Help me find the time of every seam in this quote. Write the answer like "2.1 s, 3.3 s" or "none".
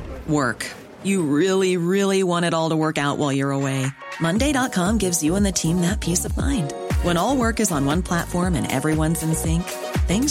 none